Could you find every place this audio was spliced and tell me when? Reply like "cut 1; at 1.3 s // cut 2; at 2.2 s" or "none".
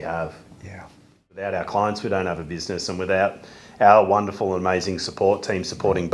cut 1; at 1.4 s